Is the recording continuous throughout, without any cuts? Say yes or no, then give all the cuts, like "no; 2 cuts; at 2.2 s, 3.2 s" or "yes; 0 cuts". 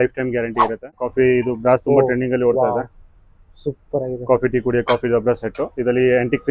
no; 1 cut; at 1.0 s